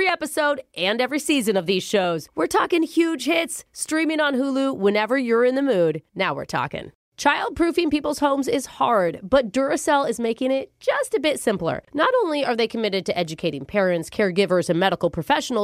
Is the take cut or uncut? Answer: cut